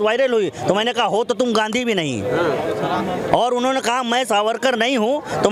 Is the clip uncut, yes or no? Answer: yes